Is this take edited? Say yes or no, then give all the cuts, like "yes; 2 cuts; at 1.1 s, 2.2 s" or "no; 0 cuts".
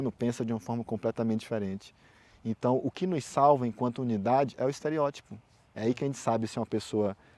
no; 0 cuts